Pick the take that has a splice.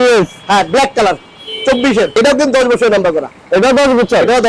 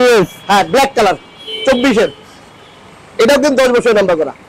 first; 1 cut; at 2.1 s

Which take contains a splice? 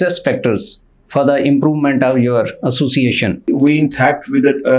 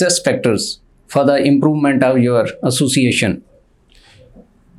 first; 1 cut; at 3.5 s

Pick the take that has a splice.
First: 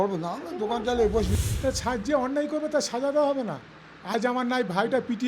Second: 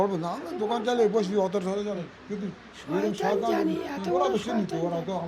first; 1 cut; at 1.3 s

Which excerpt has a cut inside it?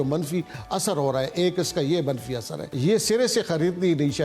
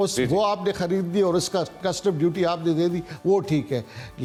first; 1 cut; at 2.6 s

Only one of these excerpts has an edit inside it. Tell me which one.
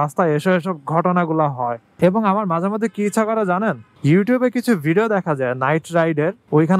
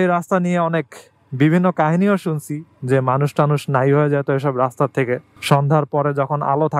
first; 1 cut; at 1.8 s

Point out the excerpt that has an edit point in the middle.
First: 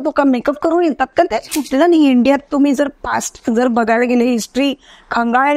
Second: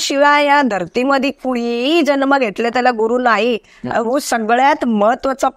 first; 1 cut; at 1.6 s

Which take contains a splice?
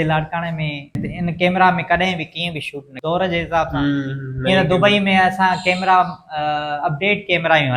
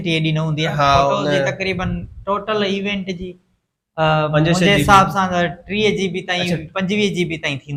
first; 2 cuts; at 1.1 s, 2.8 s

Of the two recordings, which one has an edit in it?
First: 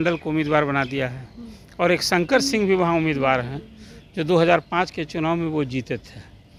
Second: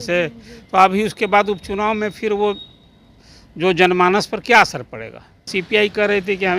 second; 1 cut; at 5.5 s

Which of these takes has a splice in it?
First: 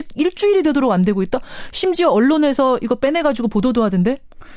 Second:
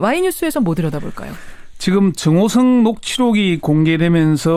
first; 1 cut; at 2.8 s

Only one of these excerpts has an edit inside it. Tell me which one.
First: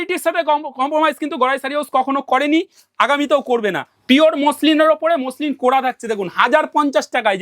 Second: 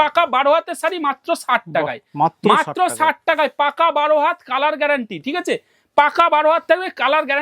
first; 1 cut; at 3.9 s

